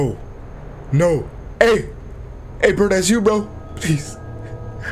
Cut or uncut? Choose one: uncut